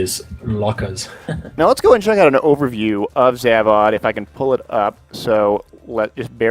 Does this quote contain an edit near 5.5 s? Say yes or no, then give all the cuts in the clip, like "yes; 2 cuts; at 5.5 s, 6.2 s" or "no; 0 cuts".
no; 1 cut; at 1.9 s